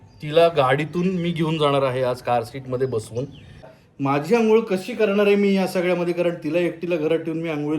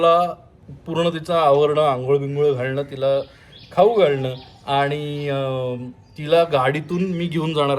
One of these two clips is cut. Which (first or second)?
first